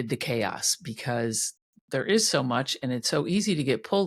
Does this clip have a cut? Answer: no; 0 cuts

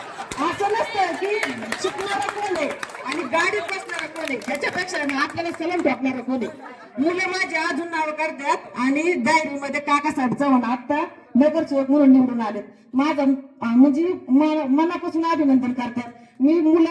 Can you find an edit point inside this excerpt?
no; 0 cuts

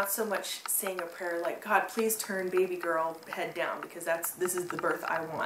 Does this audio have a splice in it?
no; 0 cuts

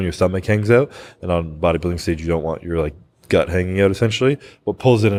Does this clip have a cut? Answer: no; 0 cuts

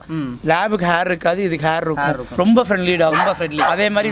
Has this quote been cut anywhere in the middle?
yes; 1 cut; at 2.2 s

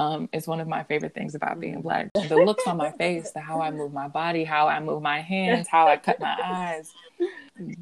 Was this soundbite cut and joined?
yes; 1 cut; at 2.1 s

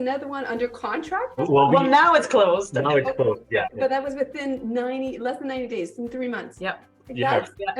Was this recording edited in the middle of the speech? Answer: yes; 3 cuts; at 1.4 s, 3.7 s, 6.5 s

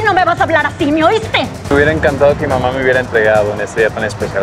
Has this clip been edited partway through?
yes; 1 cut; at 1.7 s

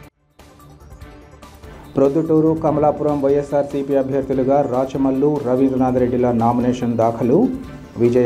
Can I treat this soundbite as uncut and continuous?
yes; 0 cuts

